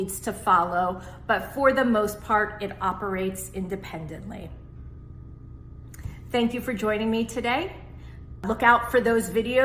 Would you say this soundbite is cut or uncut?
cut